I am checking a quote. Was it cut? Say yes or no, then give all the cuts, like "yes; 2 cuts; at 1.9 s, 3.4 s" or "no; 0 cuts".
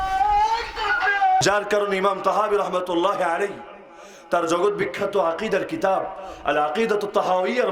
yes; 1 cut; at 1.4 s